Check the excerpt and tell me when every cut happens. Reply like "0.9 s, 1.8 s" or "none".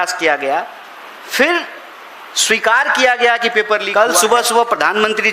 3.9 s